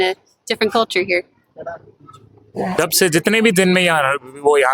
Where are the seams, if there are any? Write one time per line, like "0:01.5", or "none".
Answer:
0:02.8